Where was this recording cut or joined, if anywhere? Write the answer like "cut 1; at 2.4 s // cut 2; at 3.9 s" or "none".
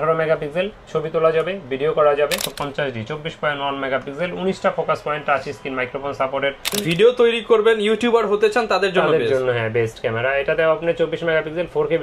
cut 1; at 2.5 s // cut 2; at 6.8 s